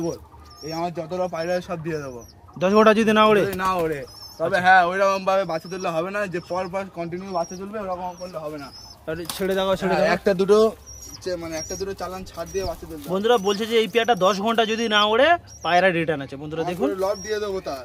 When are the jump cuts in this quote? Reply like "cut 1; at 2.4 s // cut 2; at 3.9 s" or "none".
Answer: none